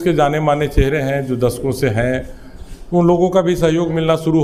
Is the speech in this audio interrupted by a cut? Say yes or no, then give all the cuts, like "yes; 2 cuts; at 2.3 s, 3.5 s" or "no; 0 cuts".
no; 0 cuts